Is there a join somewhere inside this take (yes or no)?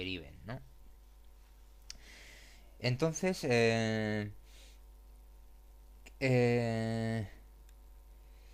yes